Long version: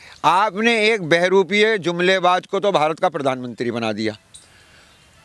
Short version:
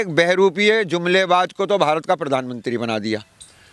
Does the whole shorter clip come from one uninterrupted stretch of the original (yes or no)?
yes